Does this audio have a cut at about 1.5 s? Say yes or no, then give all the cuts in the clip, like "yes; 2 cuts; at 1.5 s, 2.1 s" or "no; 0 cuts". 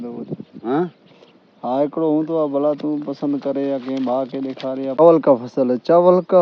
no; 1 cut; at 5.0 s